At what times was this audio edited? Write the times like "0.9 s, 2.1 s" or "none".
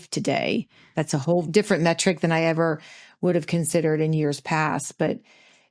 1.5 s